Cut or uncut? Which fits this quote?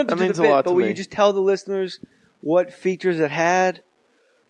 cut